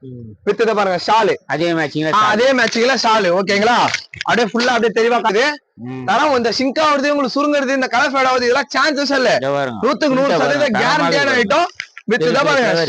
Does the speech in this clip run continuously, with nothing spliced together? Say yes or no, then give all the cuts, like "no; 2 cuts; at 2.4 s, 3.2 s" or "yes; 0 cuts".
no; 1 cut; at 5.3 s